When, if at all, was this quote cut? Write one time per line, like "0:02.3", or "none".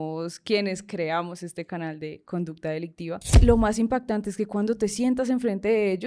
0:03.3